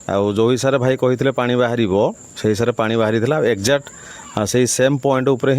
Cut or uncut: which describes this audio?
uncut